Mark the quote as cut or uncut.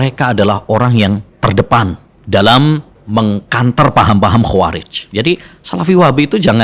cut